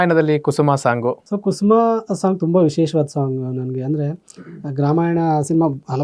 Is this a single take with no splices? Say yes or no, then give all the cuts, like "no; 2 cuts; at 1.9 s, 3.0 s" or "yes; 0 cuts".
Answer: no; 1 cut; at 1.2 s